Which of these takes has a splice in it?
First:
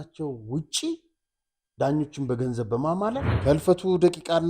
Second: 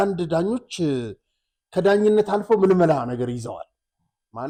first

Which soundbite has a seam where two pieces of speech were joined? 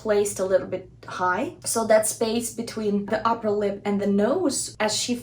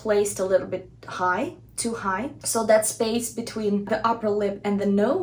first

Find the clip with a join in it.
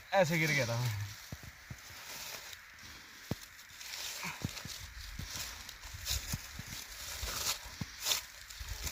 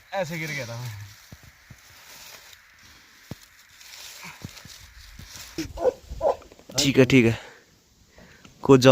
second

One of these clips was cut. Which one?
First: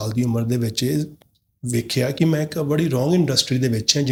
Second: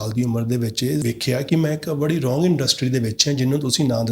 second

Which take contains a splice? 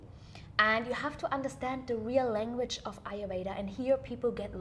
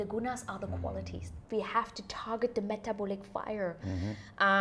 second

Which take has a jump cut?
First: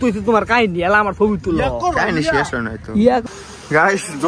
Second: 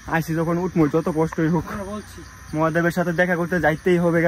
first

